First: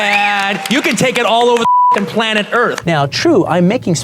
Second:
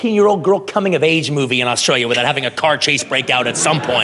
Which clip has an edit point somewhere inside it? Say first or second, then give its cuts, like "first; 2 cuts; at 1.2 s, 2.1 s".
first; 1 cut; at 2.8 s